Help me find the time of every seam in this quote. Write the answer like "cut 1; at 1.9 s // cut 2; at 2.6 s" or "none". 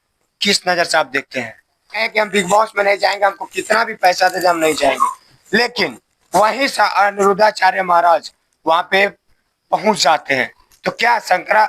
cut 1; at 2.0 s